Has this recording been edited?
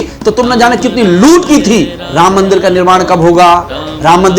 yes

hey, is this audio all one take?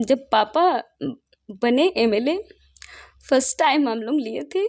yes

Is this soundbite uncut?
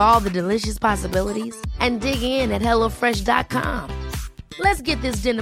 yes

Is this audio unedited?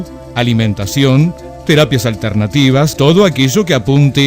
no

